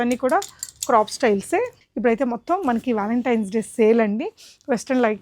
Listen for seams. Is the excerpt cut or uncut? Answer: cut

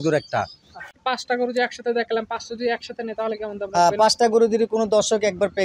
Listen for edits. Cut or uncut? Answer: cut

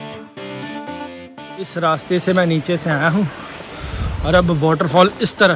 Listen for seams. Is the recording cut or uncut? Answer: cut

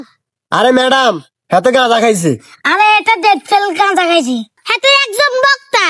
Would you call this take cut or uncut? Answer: cut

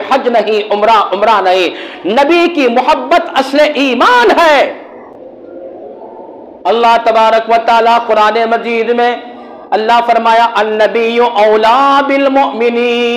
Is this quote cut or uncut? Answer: uncut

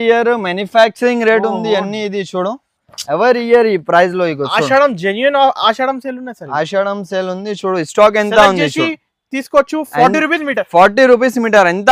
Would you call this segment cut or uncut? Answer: uncut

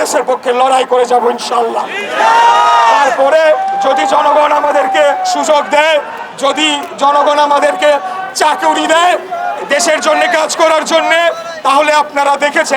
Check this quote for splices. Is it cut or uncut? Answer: uncut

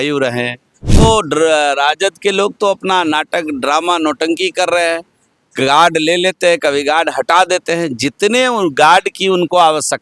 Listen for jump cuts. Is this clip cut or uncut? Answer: cut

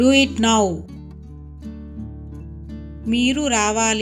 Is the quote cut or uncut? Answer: cut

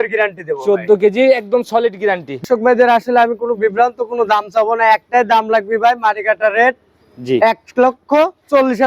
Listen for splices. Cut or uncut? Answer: cut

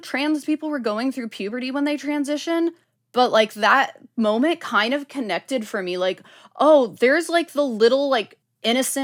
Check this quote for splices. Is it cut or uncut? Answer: uncut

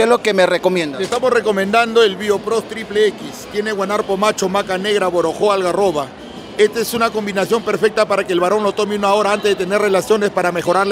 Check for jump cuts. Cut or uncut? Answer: uncut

